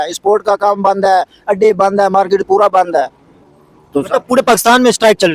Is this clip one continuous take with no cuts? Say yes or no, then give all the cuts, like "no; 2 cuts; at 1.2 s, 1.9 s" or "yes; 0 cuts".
yes; 0 cuts